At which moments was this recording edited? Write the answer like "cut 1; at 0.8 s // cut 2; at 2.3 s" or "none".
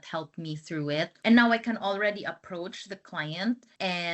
cut 1; at 1.1 s